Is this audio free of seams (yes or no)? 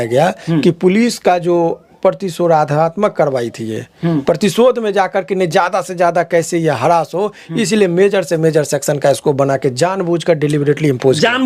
yes